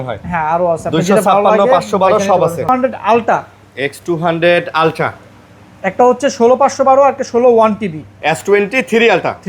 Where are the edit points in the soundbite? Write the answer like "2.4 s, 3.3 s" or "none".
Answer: 2.7 s, 8.1 s